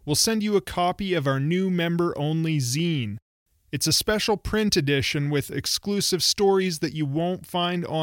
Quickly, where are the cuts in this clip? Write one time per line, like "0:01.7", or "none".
none